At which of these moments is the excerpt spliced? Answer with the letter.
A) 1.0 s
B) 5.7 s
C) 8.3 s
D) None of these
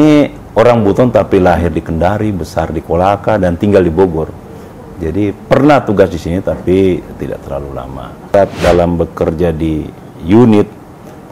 C